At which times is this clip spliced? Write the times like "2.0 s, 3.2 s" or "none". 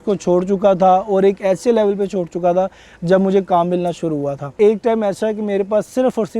4.5 s

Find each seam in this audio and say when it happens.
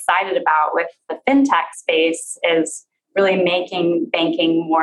1.1 s

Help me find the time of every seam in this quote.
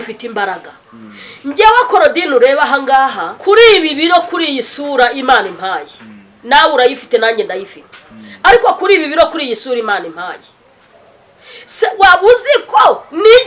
3.3 s

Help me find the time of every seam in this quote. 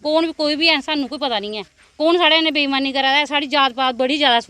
none

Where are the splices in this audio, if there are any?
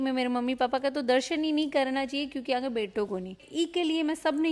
3.4 s

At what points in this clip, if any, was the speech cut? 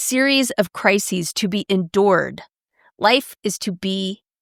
none

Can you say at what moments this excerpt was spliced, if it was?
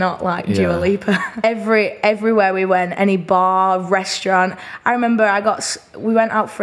1.3 s

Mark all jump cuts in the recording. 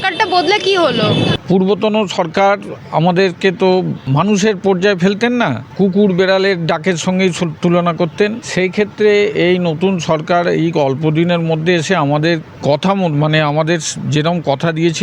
1.3 s, 4.0 s, 5.6 s, 8.4 s, 12.5 s

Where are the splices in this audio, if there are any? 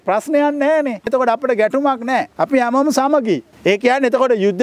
1.1 s, 2.3 s, 3.5 s

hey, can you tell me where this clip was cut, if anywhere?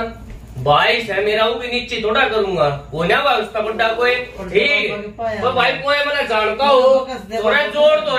4.4 s

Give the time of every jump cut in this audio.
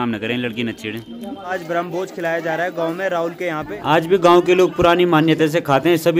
1.6 s, 3.7 s

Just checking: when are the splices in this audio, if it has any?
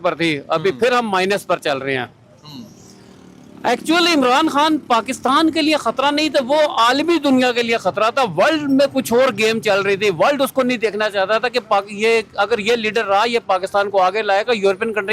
none

